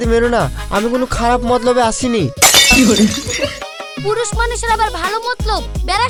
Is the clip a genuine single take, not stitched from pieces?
yes; 0 cuts

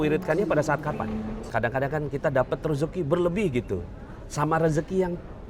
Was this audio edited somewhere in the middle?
yes; 1 cut; at 1.4 s

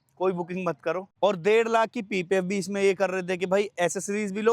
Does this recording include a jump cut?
yes; 1 cut; at 1.1 s

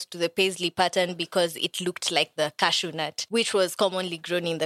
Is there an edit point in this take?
yes; 1 cut; at 3.2 s

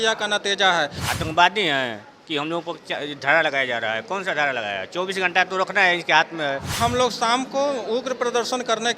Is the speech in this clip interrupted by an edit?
yes; 2 cuts; at 1.0 s, 6.8 s

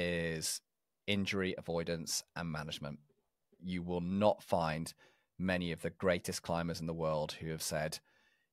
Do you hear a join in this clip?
yes; 1 cut; at 3.6 s

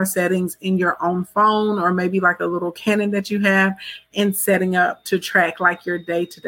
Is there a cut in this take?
no; 0 cuts

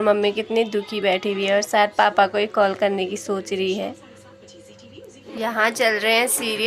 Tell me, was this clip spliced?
yes; 1 cut; at 5.2 s

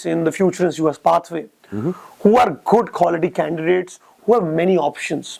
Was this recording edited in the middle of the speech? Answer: no; 0 cuts

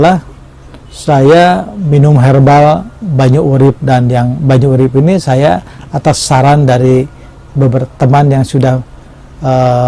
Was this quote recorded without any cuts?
yes; 0 cuts

